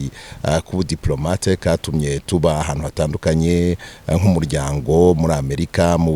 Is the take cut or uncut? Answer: uncut